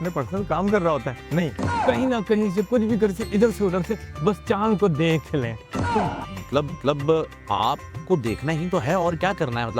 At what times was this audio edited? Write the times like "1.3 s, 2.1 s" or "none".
none